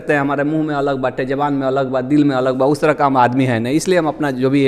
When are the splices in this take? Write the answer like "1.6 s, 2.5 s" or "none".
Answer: none